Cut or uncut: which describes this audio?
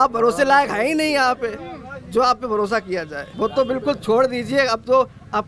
cut